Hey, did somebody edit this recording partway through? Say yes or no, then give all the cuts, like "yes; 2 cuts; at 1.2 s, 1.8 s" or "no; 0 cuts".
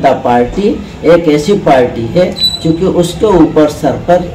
no; 0 cuts